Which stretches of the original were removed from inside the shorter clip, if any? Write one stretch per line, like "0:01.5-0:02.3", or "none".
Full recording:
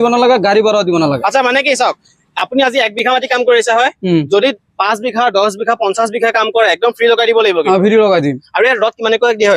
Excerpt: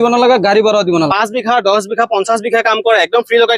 0:01.1-0:04.8